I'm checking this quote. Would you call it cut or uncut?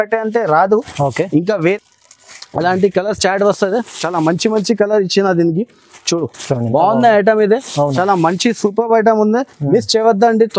cut